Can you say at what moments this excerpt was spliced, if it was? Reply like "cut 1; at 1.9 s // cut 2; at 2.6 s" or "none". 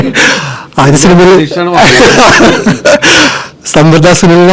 none